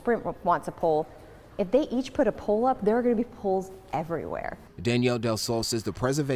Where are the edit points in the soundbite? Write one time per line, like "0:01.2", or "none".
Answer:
none